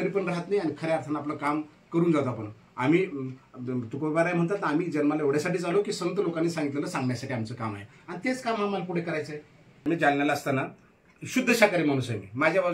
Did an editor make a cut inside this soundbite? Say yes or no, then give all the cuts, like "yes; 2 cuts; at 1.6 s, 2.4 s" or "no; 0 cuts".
yes; 1 cut; at 9.8 s